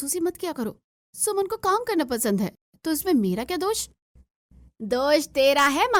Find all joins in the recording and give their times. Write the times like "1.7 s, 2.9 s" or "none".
none